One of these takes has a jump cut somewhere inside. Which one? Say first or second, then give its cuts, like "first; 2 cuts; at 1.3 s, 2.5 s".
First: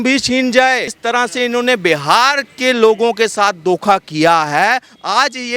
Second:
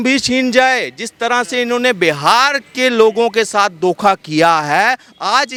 first; 1 cut; at 0.9 s